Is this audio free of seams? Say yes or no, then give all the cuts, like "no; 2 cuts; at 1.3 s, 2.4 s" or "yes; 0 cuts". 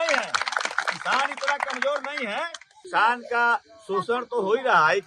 no; 1 cut; at 2.7 s